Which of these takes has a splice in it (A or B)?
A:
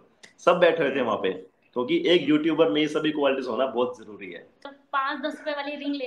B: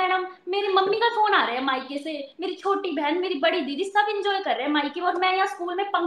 A